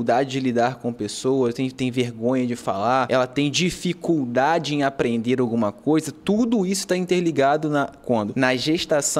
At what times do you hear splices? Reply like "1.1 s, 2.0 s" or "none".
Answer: 3.1 s, 8.3 s